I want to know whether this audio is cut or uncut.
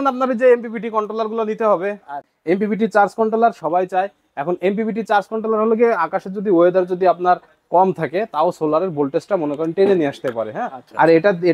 cut